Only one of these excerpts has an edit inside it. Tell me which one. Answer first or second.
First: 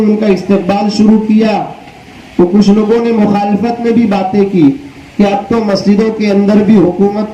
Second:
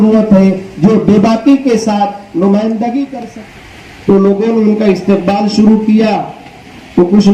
second